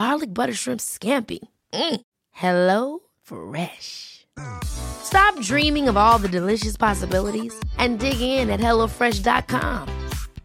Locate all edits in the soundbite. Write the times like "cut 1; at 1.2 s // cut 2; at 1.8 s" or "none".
none